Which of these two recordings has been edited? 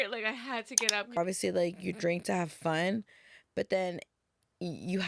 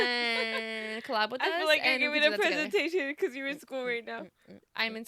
first; 1 cut; at 1.2 s

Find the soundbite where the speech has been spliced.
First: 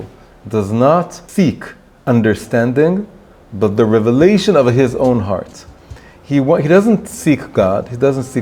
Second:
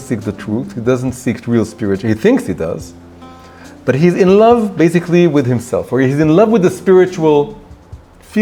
first; 1 cut; at 1.2 s

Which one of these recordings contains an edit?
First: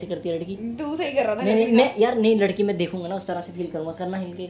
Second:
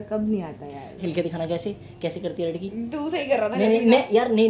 second; 1 cut; at 1.0 s

